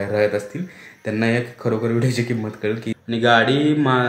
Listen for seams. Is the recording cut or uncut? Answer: cut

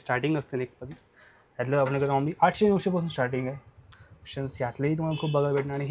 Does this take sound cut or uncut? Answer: uncut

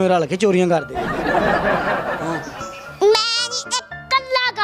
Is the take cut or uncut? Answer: uncut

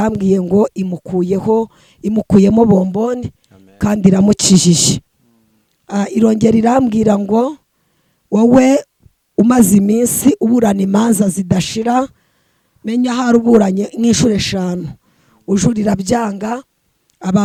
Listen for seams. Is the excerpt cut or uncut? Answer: uncut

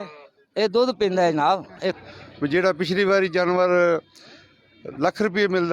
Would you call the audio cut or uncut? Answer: cut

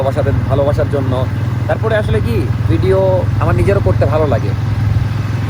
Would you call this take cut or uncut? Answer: uncut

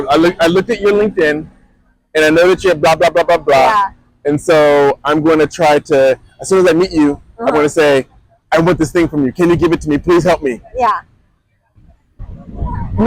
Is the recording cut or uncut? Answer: uncut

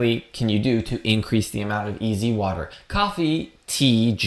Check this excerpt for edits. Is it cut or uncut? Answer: cut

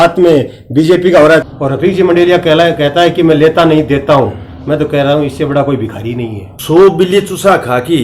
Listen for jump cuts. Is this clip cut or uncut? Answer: cut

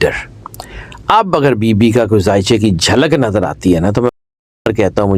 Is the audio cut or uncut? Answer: uncut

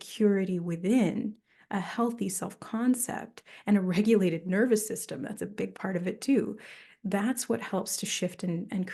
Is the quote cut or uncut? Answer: uncut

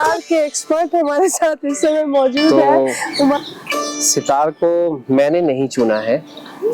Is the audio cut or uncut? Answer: cut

